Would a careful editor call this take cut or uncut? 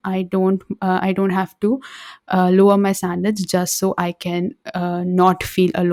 uncut